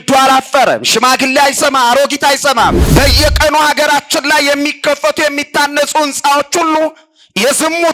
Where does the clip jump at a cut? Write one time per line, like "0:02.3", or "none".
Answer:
0:02.8